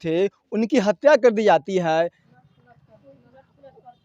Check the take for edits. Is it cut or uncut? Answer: cut